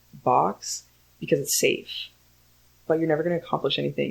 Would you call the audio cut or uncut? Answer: uncut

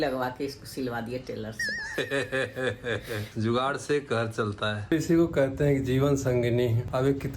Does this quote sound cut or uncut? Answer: cut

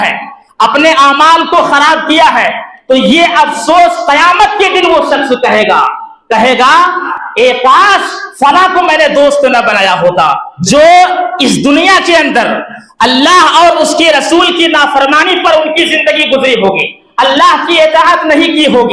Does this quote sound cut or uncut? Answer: cut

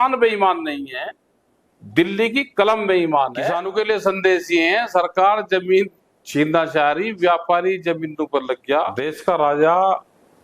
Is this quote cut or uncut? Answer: cut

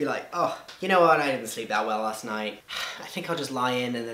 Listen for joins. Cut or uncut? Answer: uncut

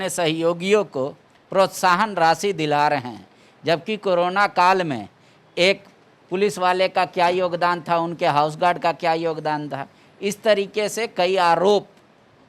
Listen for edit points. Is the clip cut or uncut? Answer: uncut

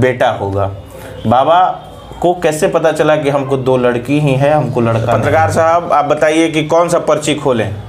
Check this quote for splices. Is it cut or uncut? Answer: cut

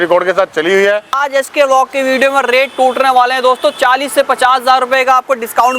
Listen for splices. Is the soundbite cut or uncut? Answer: cut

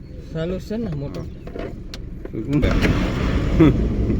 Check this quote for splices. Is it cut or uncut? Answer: cut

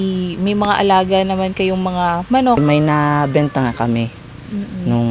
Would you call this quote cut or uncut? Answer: cut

